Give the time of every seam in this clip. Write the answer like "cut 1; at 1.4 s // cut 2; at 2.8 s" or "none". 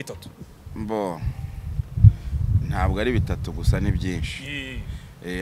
none

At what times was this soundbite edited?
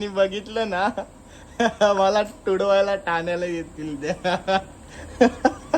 none

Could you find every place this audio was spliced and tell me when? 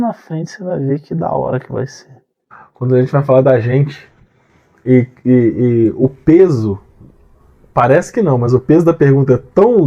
cut 1; at 2.3 s

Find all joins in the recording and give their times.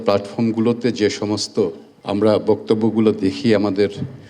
cut 1; at 1.9 s

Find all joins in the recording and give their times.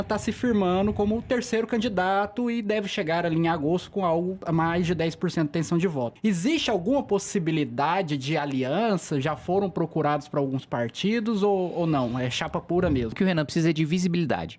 cut 1; at 4.4 s // cut 2; at 6.1 s // cut 3; at 13.1 s

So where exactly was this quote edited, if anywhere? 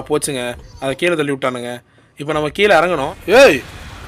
cut 1; at 3.1 s

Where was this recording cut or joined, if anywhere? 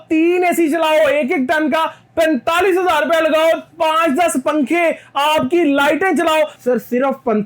cut 1; at 6.5 s

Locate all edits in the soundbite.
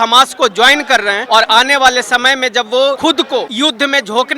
cut 1; at 1.2 s // cut 2; at 3.1 s

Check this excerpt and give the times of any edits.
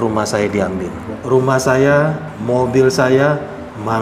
cut 1; at 1.1 s

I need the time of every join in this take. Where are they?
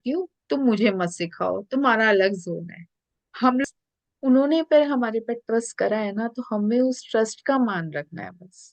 cut 1; at 3.6 s

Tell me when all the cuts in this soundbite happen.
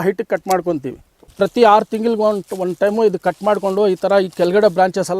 cut 1; at 1.3 s

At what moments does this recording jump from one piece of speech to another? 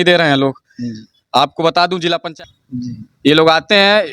cut 1; at 2.3 s

